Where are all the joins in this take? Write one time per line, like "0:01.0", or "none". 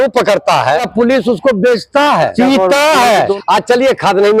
0:00.9
0:02.3
0:03.4

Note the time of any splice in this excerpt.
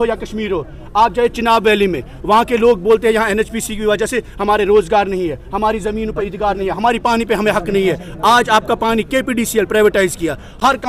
none

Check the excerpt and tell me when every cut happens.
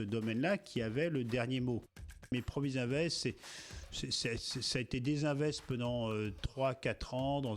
0:02.3

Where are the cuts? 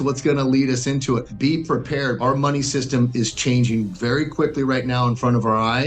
0:01.3
0:02.2

